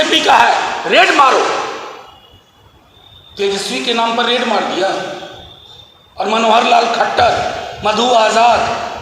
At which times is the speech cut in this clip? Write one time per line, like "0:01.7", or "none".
none